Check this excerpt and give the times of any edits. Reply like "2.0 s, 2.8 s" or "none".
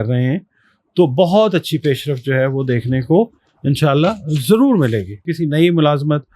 5.3 s